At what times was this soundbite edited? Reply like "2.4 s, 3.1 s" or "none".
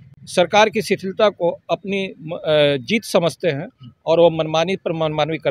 none